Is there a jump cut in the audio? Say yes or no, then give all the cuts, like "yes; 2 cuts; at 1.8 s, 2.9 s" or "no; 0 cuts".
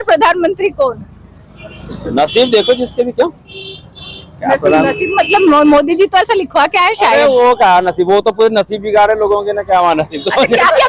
no; 0 cuts